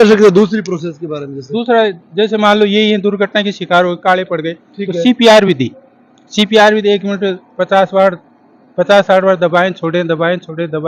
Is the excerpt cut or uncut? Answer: uncut